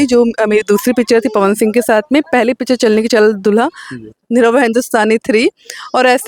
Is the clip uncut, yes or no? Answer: yes